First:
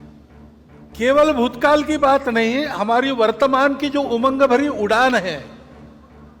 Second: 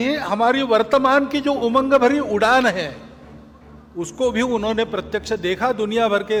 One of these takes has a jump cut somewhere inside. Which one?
first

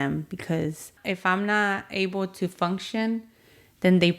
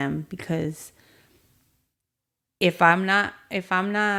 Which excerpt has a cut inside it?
first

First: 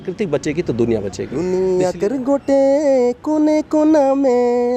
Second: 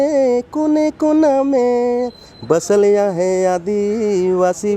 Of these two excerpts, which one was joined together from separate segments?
first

